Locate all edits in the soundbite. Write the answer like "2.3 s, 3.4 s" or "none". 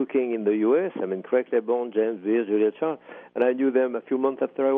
none